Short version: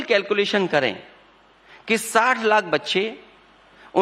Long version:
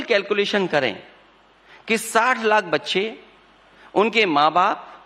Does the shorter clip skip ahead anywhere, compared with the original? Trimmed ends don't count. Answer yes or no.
no